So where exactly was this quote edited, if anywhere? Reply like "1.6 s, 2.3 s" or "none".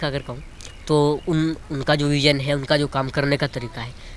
none